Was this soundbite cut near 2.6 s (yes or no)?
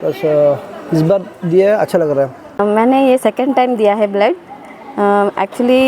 yes